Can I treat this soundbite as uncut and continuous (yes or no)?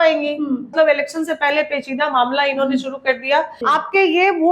no